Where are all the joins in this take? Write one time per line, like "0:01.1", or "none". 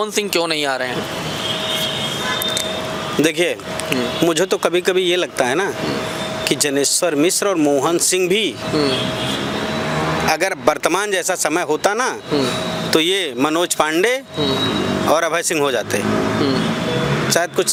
none